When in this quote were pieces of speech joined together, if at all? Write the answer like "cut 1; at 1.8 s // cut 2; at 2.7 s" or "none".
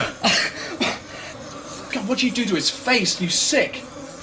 cut 1; at 3.0 s